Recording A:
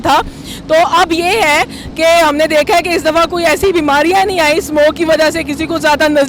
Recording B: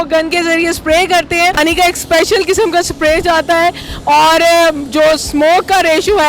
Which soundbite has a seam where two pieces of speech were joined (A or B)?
B